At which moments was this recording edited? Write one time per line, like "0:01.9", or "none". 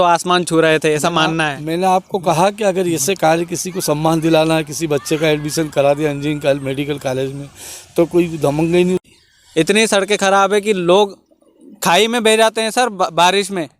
0:09.1

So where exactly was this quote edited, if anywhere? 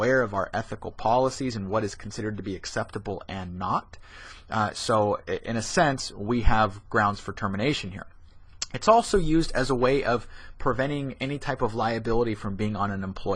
0:09.4

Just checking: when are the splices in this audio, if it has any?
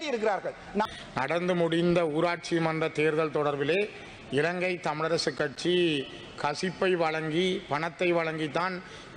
0:00.9

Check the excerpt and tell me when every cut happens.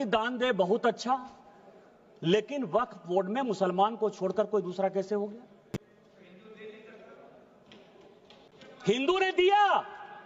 none

